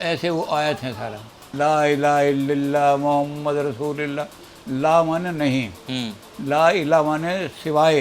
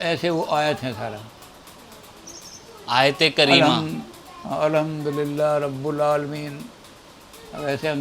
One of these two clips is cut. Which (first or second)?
first